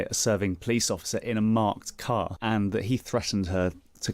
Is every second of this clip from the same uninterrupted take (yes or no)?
no